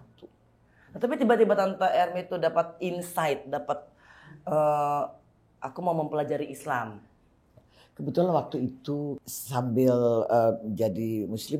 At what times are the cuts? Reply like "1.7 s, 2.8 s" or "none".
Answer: 9.2 s